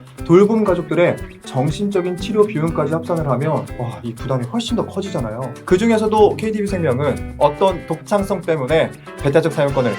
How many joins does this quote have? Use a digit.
1